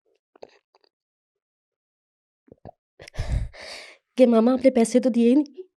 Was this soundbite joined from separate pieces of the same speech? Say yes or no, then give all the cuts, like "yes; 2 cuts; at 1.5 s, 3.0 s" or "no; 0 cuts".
no; 0 cuts